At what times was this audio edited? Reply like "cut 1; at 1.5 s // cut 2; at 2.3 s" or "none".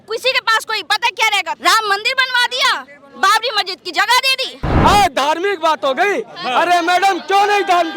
cut 1; at 1.6 s // cut 2; at 4.6 s